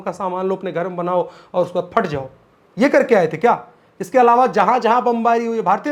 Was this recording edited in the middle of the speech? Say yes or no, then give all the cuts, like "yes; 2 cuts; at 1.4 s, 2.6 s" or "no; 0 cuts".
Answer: no; 0 cuts